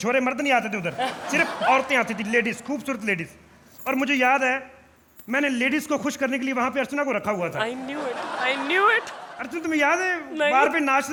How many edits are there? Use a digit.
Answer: 0